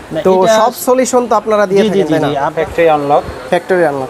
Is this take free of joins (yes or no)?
no